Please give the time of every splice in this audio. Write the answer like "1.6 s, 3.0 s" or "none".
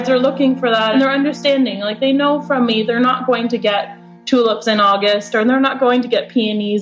0.9 s